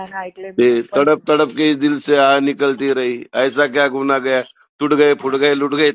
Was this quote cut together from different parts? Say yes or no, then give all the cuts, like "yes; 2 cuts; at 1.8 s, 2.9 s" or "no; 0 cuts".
no; 0 cuts